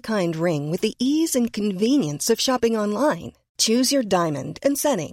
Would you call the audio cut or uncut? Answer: uncut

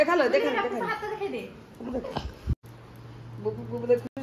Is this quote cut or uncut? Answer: cut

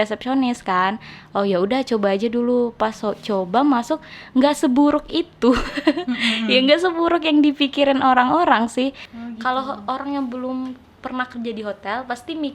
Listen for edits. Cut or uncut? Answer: cut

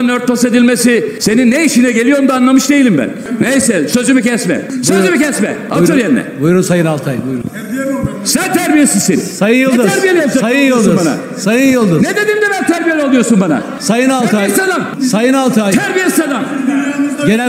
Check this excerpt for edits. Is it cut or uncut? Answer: cut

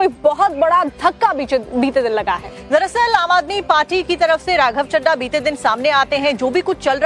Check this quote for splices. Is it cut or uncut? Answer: cut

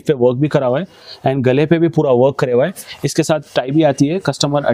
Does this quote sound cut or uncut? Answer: uncut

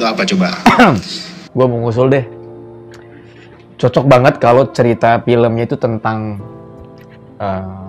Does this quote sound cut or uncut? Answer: uncut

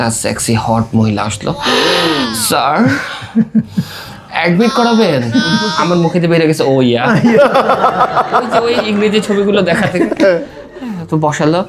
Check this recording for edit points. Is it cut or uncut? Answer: uncut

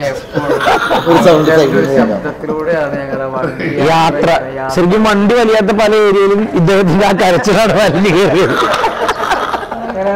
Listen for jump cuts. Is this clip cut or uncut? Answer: uncut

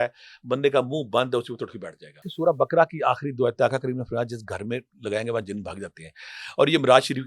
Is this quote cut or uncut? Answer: cut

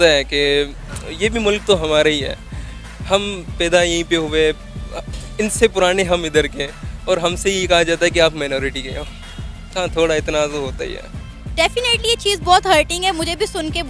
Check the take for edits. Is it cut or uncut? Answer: uncut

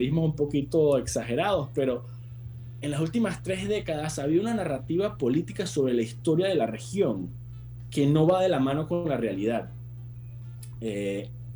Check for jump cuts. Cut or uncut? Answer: uncut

